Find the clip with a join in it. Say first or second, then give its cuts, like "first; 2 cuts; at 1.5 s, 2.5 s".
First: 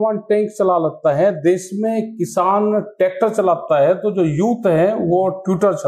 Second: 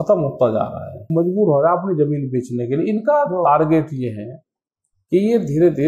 second; 1 cut; at 1.1 s